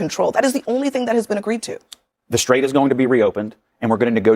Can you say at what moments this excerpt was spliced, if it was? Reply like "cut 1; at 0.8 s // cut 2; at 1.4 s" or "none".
none